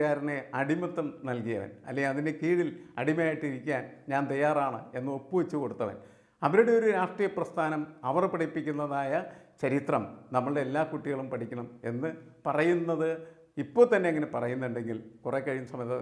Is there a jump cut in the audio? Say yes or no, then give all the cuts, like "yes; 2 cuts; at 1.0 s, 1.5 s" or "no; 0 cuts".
no; 0 cuts